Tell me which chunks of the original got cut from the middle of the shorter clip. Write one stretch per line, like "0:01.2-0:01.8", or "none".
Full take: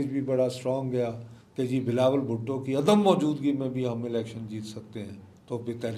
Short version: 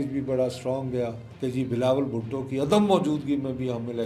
0:01.2-0:01.4